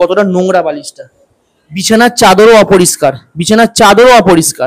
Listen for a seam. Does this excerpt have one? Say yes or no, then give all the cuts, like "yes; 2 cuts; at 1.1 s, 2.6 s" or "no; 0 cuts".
no; 0 cuts